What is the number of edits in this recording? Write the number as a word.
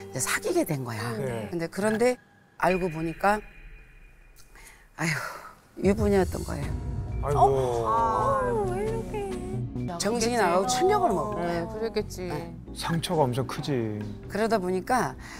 two